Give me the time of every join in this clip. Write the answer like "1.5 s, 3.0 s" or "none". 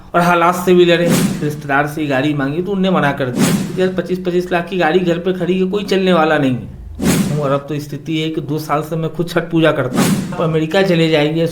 1.4 s, 3.7 s, 7.3 s, 10.3 s